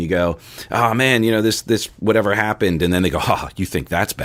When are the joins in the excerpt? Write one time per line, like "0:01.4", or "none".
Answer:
none